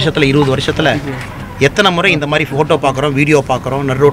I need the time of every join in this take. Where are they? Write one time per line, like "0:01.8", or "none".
none